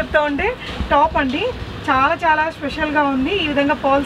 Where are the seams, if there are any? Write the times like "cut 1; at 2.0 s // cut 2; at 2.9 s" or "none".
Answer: none